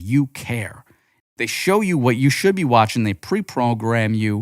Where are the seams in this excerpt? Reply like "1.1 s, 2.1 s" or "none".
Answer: 1.1 s